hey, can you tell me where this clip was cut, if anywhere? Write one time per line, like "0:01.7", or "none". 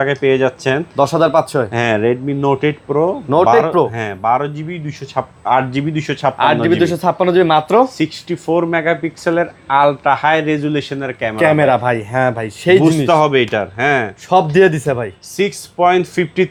none